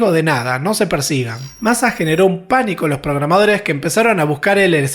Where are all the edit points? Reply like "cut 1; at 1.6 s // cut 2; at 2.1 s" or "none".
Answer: cut 1; at 1.4 s

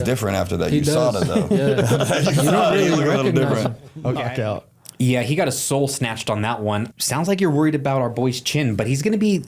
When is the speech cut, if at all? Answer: cut 1; at 4.2 s // cut 2; at 6.9 s

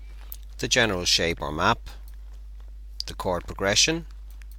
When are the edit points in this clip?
cut 1; at 3.6 s

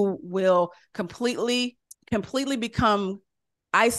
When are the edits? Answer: cut 1; at 1.9 s

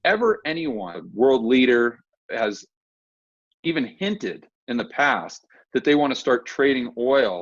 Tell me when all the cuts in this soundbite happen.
cut 1; at 1.0 s

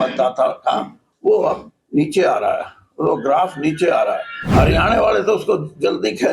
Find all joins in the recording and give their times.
cut 1; at 4.3 s

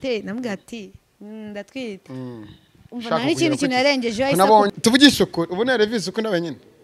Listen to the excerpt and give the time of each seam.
cut 1; at 4.7 s

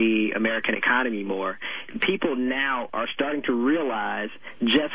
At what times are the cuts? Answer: cut 1; at 1.9 s

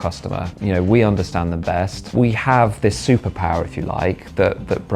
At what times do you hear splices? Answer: cut 1; at 2.1 s

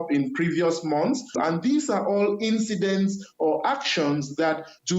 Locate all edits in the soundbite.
none

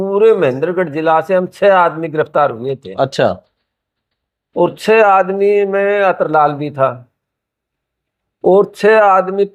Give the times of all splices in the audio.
none

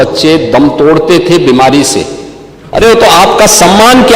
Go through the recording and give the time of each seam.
cut 1; at 2.6 s

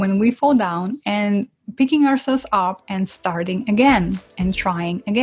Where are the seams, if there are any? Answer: none

